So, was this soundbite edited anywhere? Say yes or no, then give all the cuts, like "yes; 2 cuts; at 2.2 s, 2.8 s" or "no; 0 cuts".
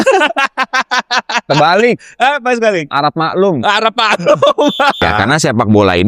yes; 1 cut; at 5.0 s